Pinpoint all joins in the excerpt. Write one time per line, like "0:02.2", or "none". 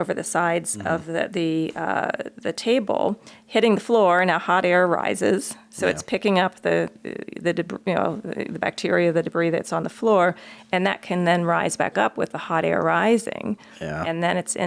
none